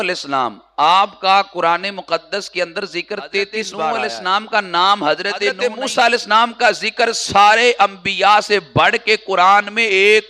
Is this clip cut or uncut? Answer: cut